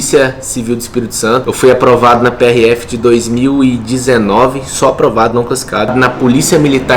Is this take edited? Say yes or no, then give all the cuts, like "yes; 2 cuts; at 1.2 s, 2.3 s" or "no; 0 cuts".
yes; 2 cuts; at 1.5 s, 5.9 s